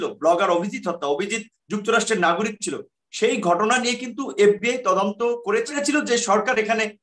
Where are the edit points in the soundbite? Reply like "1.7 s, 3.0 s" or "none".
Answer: 5.7 s